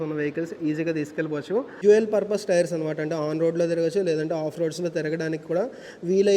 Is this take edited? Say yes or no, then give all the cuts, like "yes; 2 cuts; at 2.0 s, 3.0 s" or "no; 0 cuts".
yes; 1 cut; at 1.7 s